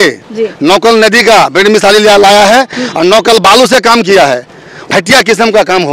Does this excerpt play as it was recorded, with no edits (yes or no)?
no